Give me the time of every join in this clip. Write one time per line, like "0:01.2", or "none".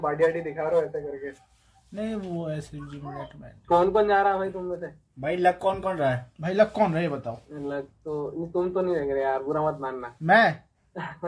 none